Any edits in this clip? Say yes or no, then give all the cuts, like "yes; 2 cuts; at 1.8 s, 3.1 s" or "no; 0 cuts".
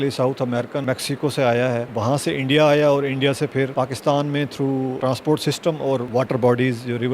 yes; 5 cuts; at 0.8 s, 1.9 s, 3.7 s, 5.0 s, 6.1 s